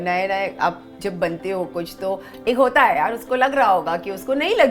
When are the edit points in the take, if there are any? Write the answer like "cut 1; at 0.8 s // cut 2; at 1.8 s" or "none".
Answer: none